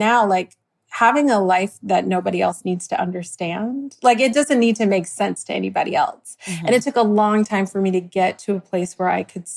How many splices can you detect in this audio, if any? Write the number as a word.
zero